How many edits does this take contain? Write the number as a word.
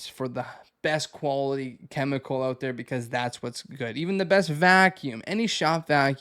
zero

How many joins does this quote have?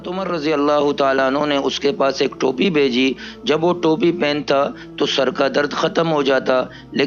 zero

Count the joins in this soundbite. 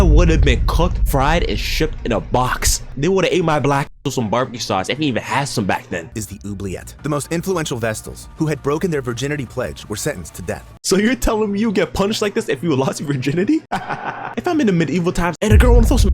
three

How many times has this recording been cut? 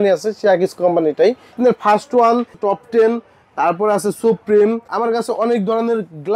three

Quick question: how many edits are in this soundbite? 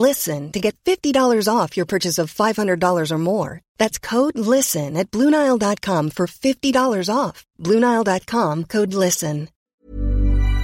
one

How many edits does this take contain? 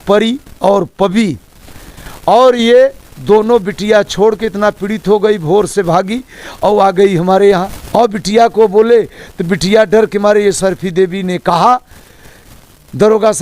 one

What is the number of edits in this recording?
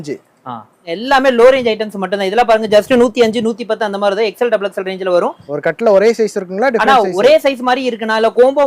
two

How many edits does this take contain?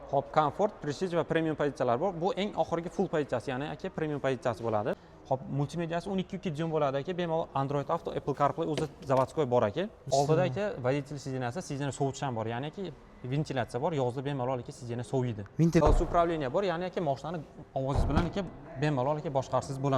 three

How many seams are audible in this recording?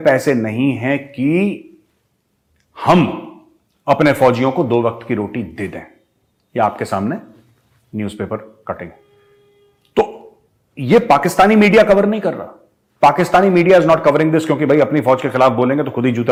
zero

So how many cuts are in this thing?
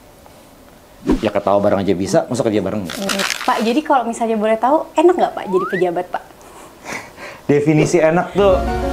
one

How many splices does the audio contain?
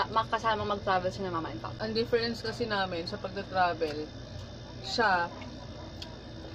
one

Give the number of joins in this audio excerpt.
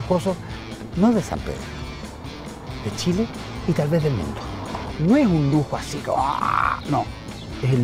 zero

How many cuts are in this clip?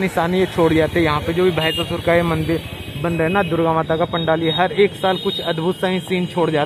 zero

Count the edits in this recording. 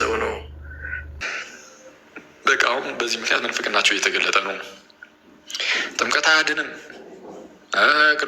one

